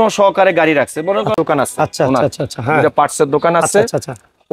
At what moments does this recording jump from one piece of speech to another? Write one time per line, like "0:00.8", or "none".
0:01.3